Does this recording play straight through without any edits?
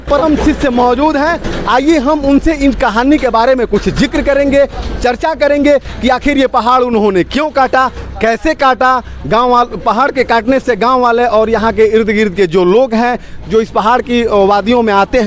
yes; 0 cuts

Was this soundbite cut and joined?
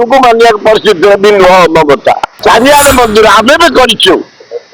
yes; 1 cut; at 2.3 s

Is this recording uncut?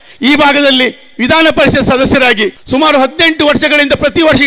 no; 1 cut; at 2.6 s

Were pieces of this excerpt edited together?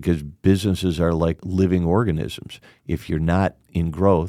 yes; 1 cut; at 1.4 s

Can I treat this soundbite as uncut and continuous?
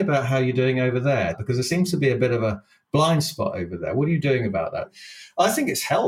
no; 2 cuts; at 1.4 s, 4.9 s

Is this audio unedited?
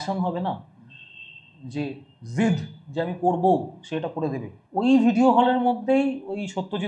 no; 1 cut; at 4.5 s

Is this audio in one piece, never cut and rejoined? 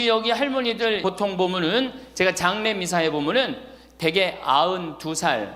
no; 1 cut; at 1.0 s

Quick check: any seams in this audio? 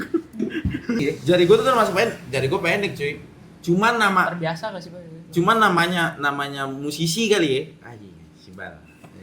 yes; 1 cut; at 1.0 s

